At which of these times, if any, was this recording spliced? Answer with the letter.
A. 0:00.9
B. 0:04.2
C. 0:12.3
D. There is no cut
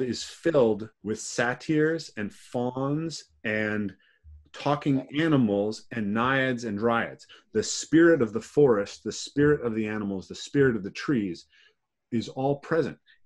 A